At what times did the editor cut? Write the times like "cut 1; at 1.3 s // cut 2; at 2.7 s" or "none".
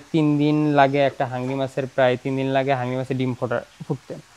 none